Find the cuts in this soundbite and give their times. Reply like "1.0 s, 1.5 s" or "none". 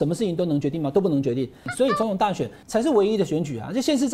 1.6 s, 2.6 s